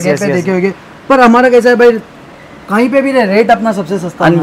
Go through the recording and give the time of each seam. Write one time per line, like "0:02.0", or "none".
none

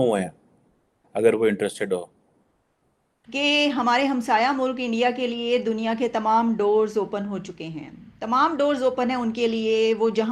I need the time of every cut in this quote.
0:03.3

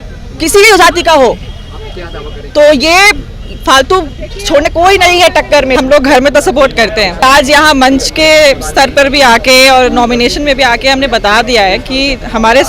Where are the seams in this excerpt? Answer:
0:05.8
0:07.2

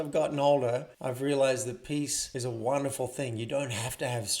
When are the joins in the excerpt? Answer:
0:01.0
0:02.2

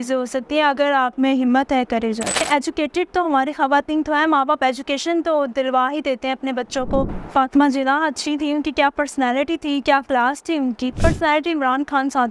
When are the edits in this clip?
0:02.4
0:07.1
0:10.9

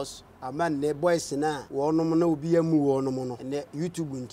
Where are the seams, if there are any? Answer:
0:01.6
0:03.4

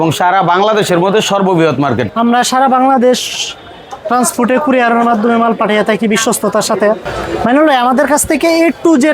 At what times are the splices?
0:02.1
0:07.1

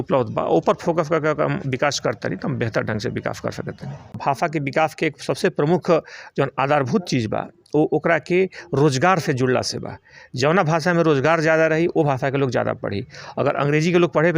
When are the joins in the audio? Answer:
0:04.2

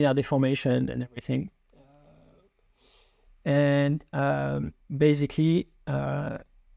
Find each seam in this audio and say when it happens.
none

